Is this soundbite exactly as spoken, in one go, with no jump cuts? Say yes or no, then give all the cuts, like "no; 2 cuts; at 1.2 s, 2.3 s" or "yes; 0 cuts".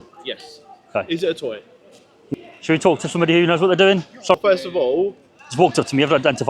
no; 2 cuts; at 2.2 s, 4.4 s